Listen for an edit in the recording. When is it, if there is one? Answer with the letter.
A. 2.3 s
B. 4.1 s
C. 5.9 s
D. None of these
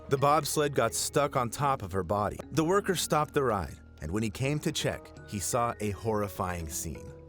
A